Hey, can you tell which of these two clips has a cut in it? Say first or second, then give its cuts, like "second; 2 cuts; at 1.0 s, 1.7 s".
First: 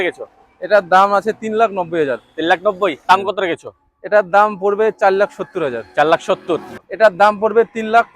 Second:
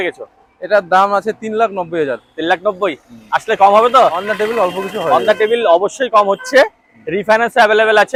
first; 2 cuts; at 3.1 s, 6.8 s